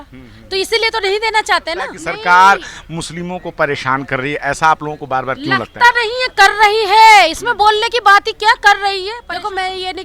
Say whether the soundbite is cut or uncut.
cut